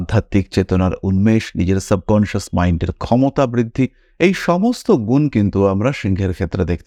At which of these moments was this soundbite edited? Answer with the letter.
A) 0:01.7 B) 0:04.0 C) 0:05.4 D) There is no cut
D